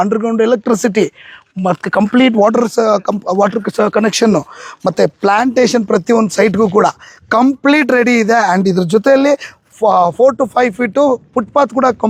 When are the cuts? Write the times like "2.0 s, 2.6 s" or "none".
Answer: none